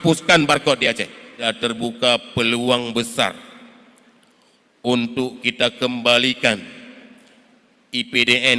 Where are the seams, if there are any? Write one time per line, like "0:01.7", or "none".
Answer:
0:01.5